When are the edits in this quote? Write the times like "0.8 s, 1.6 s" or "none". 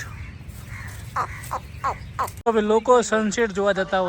2.4 s